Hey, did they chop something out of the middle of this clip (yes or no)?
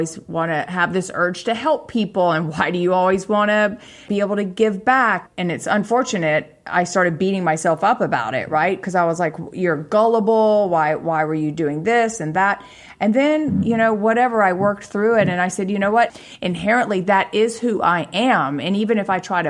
yes